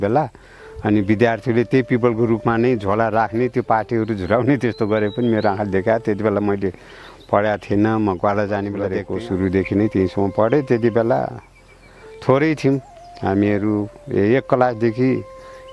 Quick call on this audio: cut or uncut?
cut